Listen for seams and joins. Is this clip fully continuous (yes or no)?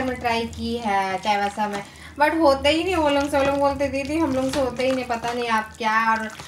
yes